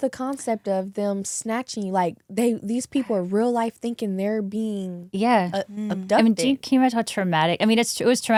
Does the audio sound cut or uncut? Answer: uncut